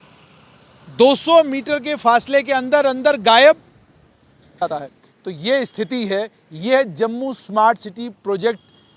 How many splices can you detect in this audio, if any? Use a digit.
1